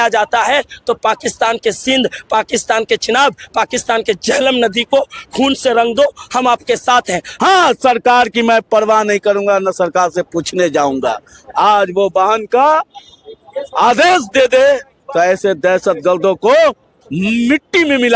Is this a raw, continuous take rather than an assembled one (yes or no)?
no